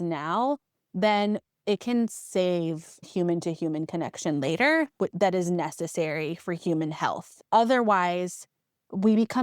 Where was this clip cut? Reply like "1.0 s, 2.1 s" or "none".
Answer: 1.5 s, 3.1 s, 7.4 s

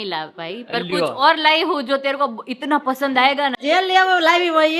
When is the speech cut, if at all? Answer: 3.6 s

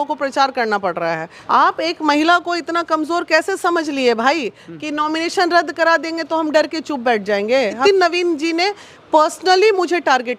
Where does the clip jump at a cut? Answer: 1.3 s, 7.8 s

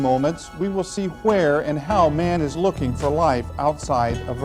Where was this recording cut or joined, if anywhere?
2.6 s

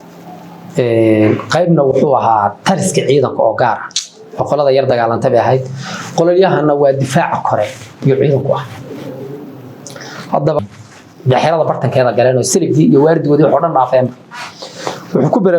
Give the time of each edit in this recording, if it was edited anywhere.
10.6 s

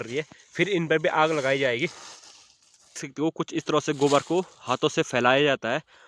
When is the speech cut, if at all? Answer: 3.1 s

